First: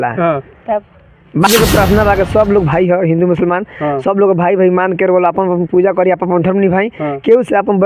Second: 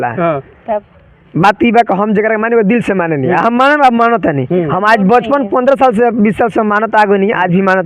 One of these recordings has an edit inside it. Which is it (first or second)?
first